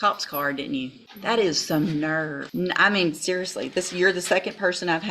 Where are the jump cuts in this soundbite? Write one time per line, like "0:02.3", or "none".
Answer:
0:01.1
0:02.4